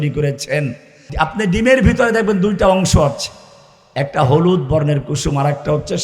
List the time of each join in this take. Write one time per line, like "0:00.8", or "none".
0:01.1